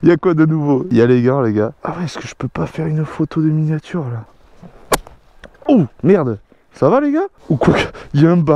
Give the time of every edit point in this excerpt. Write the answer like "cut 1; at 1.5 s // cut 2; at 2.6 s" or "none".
cut 1; at 1.7 s // cut 2; at 4.2 s // cut 3; at 7.4 s

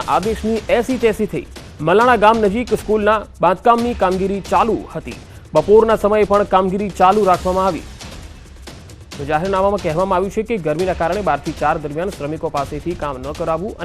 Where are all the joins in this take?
cut 1; at 3.4 s

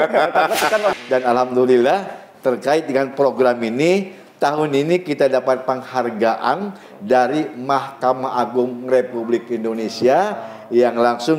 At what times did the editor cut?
cut 1; at 0.9 s

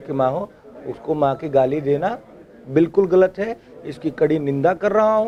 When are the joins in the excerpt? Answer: none

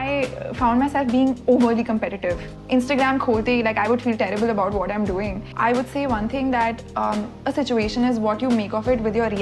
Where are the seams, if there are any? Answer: cut 1; at 2.5 s // cut 2; at 5.4 s

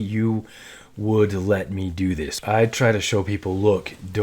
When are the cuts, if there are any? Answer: cut 1; at 2.3 s

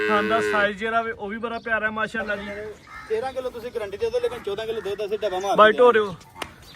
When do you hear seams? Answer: cut 1; at 2.5 s

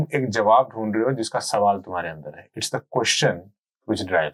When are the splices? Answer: none

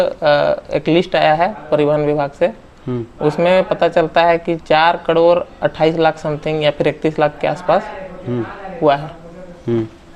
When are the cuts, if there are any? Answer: none

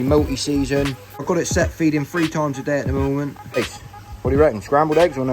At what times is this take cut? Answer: cut 1; at 1.2 s // cut 2; at 3.6 s

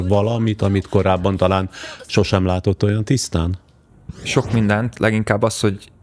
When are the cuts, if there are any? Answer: none

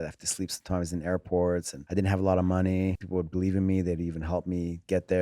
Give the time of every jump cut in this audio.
cut 1; at 1.8 s // cut 2; at 3.0 s

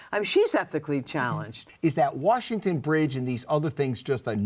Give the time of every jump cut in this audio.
cut 1; at 1.6 s

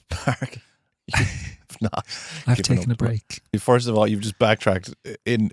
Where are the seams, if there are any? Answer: cut 1; at 3.5 s

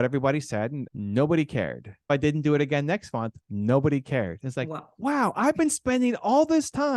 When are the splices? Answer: cut 1; at 0.8 s // cut 2; at 2.1 s

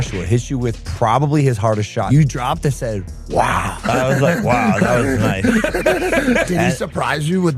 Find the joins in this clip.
cut 1; at 2.1 s // cut 2; at 6.5 s

